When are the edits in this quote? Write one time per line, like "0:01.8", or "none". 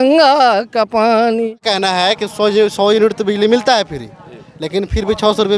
0:01.6